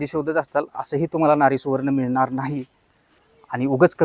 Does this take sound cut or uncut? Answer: uncut